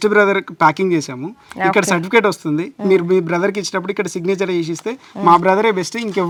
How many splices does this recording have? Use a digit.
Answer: 0